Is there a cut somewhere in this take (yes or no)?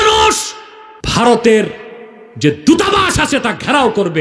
yes